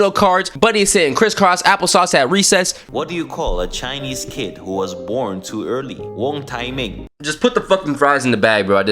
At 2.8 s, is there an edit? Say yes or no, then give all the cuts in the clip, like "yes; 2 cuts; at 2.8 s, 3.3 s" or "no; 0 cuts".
yes; 2 cuts; at 2.8 s, 7.0 s